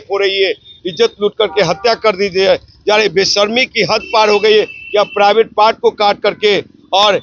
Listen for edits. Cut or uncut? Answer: uncut